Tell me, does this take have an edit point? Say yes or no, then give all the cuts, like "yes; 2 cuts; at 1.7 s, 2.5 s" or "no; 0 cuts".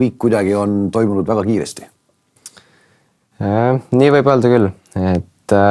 no; 0 cuts